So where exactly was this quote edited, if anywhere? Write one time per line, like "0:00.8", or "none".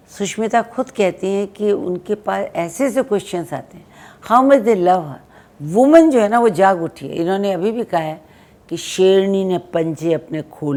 none